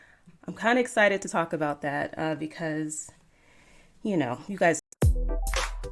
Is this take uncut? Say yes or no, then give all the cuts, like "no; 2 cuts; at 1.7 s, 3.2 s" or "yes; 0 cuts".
no; 1 cut; at 4.8 s